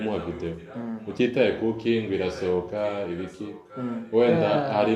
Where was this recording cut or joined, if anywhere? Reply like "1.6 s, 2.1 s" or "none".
none